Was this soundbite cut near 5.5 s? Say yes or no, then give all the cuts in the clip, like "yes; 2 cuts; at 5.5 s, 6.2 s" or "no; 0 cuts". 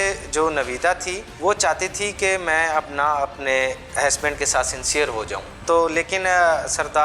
yes; 2 cuts; at 1.3 s, 5.5 s